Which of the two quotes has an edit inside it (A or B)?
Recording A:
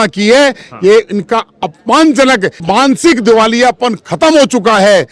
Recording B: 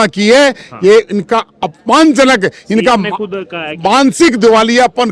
A